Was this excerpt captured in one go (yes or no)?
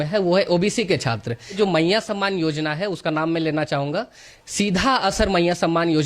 no